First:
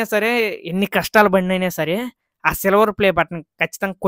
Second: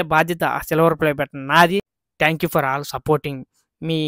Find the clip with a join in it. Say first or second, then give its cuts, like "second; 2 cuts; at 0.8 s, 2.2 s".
second; 1 cut; at 2.0 s